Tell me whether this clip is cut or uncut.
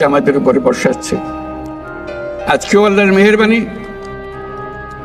uncut